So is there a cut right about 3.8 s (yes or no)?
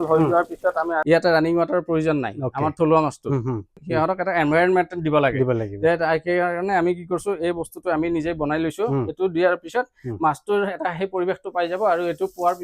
yes